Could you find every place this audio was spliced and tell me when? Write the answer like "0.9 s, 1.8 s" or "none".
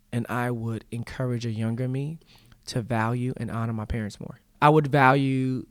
4.5 s